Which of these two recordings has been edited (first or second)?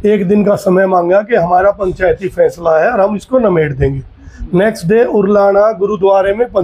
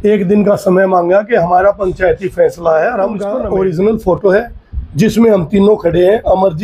second